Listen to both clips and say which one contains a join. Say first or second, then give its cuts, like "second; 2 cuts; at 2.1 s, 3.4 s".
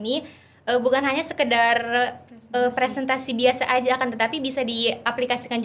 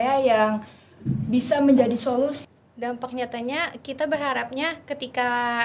second; 1 cut; at 2.5 s